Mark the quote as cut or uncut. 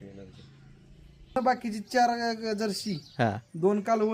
cut